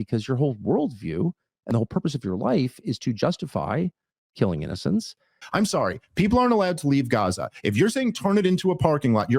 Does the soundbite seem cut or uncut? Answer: cut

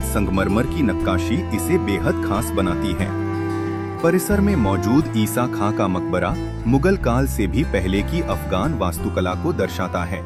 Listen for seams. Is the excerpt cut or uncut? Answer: uncut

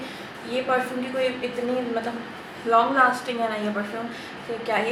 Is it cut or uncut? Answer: uncut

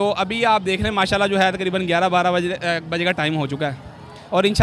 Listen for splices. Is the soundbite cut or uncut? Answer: uncut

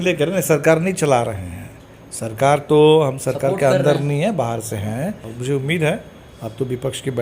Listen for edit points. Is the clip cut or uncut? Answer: cut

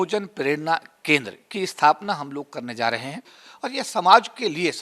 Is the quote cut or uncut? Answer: cut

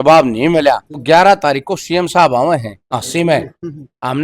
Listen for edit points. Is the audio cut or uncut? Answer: cut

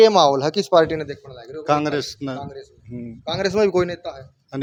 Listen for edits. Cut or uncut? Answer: uncut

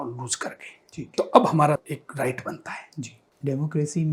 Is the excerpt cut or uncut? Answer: uncut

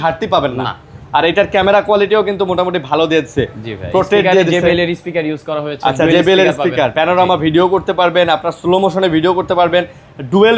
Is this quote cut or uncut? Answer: uncut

